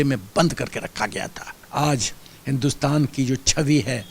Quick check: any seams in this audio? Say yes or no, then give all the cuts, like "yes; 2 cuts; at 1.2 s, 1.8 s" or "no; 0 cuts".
yes; 1 cut; at 1.5 s